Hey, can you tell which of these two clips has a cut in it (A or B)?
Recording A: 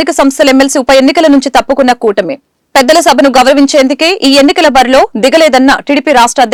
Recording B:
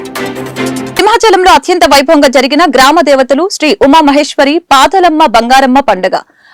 B